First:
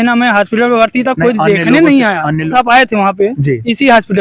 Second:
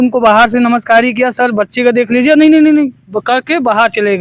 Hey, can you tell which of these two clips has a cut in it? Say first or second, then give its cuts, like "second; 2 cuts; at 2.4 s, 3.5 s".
first; 1 cut; at 2.5 s